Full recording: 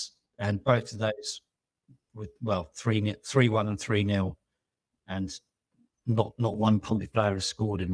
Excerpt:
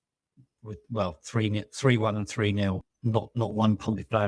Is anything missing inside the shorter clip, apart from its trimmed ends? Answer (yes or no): yes